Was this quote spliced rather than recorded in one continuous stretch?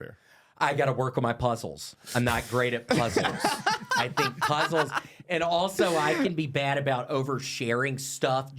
no; 0 cuts

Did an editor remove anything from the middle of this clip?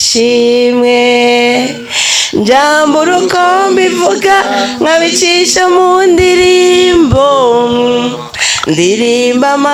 no; 0 cuts

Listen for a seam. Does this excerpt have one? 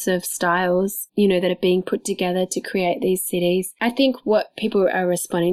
yes; 1 cut; at 3.7 s

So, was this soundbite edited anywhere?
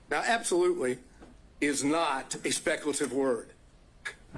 yes; 1 cut; at 1.7 s

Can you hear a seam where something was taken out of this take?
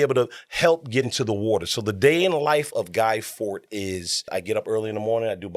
yes; 2 cuts; at 1.1 s, 4.2 s

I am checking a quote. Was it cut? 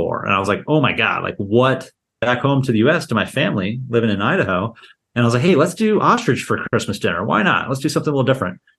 yes; 1 cut; at 2.2 s

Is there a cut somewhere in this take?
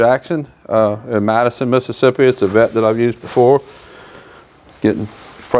no; 0 cuts

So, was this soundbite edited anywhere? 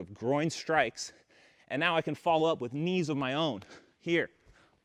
no; 0 cuts

